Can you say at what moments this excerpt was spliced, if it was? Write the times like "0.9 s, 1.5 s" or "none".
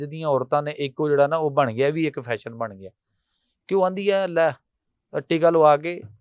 none